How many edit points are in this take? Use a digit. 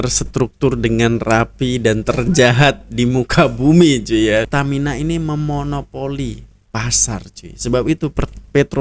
1